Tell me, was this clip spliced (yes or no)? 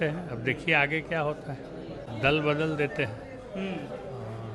yes